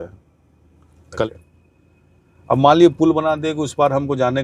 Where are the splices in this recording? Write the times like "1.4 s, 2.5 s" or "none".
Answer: 1.1 s